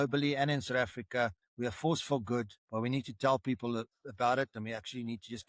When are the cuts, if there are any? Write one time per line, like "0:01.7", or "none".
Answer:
0:01.4
0:02.6